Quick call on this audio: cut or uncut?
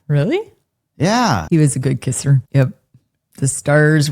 cut